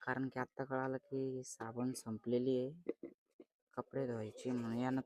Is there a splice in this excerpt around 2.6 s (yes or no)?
no